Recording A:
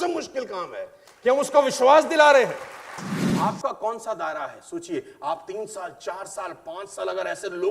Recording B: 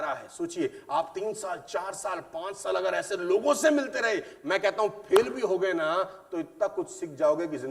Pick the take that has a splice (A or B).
A